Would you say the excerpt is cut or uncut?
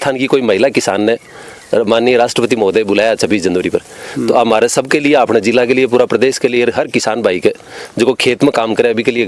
uncut